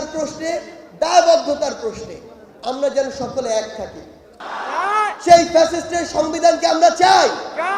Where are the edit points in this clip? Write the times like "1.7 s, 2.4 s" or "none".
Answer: 4.2 s